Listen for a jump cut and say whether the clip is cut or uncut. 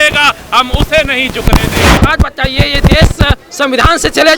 cut